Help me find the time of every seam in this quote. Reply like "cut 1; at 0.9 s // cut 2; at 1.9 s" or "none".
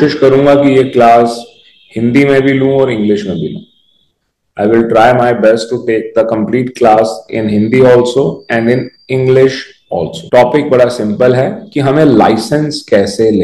cut 1; at 10.2 s